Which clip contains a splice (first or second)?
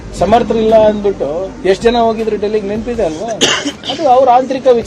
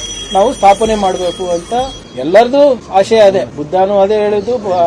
second